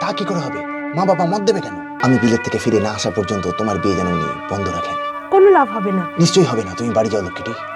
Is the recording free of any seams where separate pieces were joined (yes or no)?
no